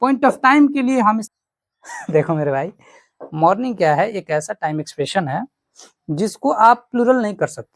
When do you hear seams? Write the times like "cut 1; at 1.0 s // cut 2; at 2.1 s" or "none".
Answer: cut 1; at 1.3 s

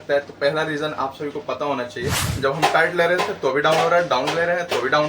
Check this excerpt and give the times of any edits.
cut 1; at 2.3 s

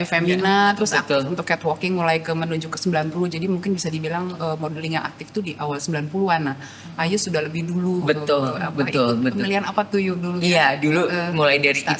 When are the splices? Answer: none

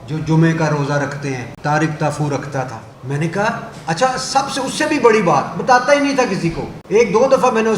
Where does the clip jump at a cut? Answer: cut 1; at 1.5 s // cut 2; at 2.9 s // cut 3; at 6.7 s

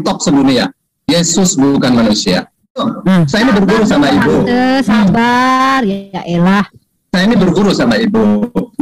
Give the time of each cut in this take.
cut 1; at 2.9 s

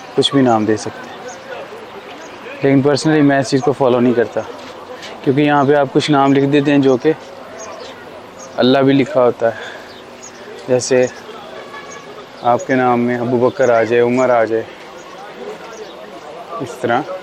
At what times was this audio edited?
none

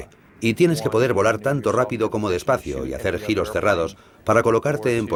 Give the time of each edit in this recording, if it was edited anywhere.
none

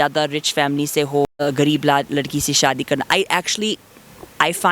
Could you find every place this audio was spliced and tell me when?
cut 1; at 1.3 s

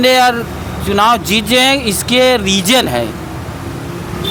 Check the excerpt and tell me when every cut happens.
none

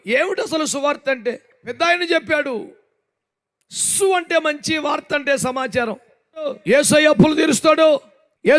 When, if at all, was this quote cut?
cut 1; at 1.8 s // cut 2; at 6.6 s

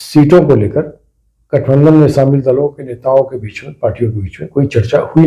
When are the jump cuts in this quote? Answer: none

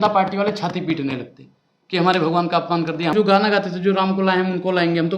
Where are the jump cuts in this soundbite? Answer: cut 1; at 3.1 s

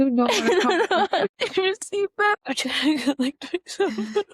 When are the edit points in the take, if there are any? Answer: cut 1; at 1.3 s // cut 2; at 2.4 s

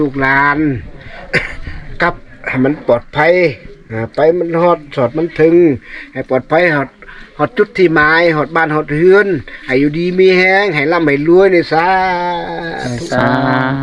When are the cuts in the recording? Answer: none

